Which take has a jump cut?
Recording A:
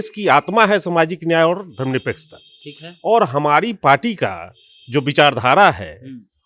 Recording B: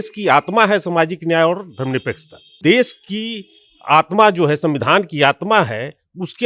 B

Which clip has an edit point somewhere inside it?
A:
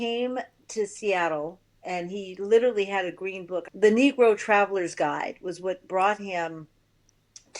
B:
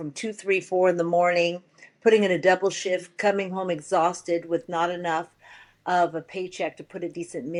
A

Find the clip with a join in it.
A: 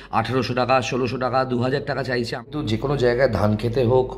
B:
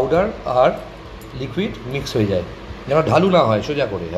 A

